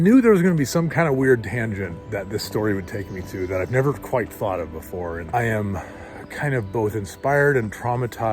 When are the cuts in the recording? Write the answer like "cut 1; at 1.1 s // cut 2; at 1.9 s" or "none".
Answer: cut 1; at 5.2 s